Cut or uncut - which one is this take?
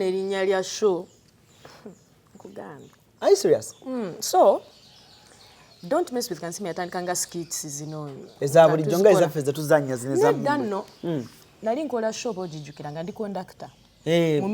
uncut